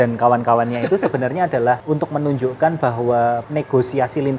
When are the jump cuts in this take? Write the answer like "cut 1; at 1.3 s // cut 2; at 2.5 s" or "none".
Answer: cut 1; at 1.8 s // cut 2; at 3.5 s

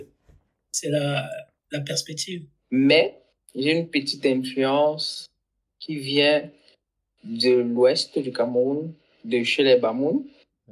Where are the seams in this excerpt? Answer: cut 1; at 2.6 s

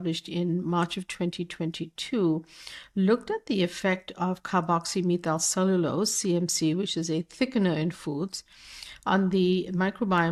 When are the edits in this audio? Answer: none

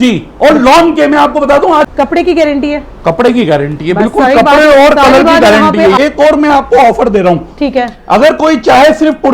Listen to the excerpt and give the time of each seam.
cut 1; at 1.9 s // cut 2; at 6.0 s

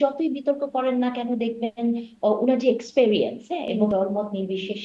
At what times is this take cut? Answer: cut 1; at 3.8 s

